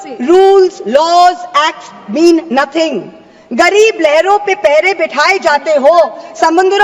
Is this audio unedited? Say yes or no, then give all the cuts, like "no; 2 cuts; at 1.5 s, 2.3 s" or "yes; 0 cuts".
yes; 0 cuts